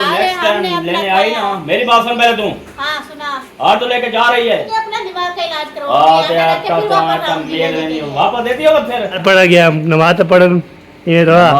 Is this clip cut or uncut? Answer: cut